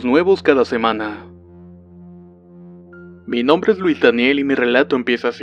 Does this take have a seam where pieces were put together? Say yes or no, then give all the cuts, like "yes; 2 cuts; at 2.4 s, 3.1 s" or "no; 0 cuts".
no; 0 cuts